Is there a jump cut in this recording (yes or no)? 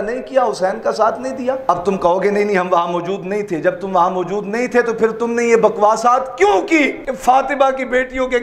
yes